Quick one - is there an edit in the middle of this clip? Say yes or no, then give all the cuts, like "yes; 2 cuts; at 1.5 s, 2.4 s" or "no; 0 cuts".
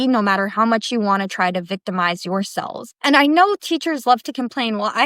yes; 1 cut; at 2.9 s